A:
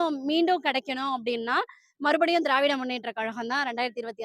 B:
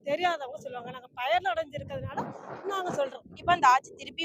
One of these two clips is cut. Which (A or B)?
B